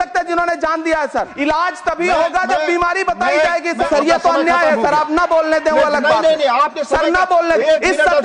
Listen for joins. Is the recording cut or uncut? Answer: cut